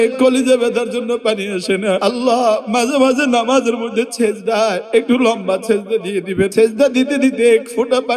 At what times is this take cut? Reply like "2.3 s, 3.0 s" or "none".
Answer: 2.0 s, 4.8 s, 6.5 s

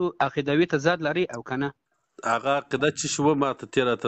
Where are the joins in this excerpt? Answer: none

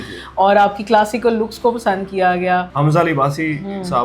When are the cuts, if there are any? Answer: 2.7 s

